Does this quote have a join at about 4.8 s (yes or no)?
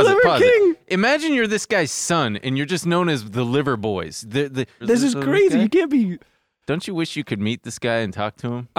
yes